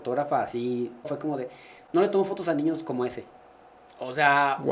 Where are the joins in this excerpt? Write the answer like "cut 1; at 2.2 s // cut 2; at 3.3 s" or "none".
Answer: cut 1; at 1.1 s